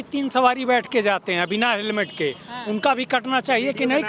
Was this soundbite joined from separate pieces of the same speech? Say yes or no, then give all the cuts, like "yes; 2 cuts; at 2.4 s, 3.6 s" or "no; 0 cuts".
no; 0 cuts